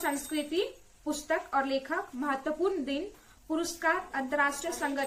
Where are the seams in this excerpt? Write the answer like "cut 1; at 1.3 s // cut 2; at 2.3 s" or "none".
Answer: none